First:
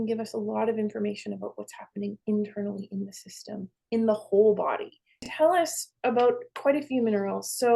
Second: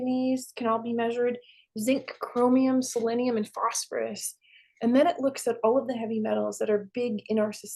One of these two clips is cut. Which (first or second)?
first